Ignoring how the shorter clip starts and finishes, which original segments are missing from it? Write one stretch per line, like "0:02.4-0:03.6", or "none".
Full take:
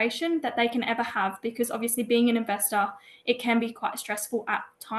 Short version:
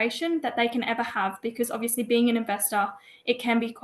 none